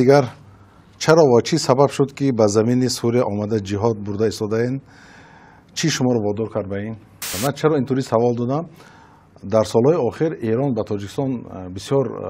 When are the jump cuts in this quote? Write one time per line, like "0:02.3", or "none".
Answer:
0:07.2